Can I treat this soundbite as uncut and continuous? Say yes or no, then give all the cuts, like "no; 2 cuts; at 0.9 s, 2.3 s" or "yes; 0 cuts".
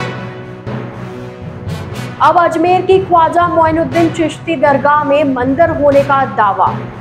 no; 1 cut; at 2.0 s